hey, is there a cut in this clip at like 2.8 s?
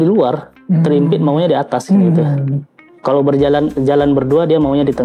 no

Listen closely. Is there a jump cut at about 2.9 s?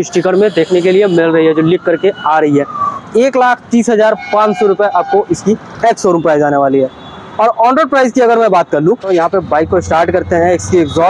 yes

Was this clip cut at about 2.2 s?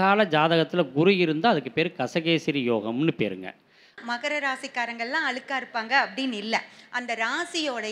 no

